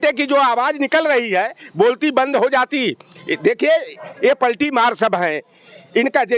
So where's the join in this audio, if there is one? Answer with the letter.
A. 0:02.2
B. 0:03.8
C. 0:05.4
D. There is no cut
D